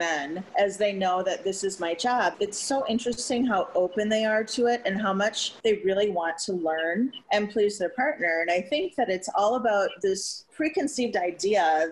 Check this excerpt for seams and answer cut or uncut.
cut